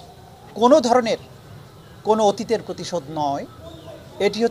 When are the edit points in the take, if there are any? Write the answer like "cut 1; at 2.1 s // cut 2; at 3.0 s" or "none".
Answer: none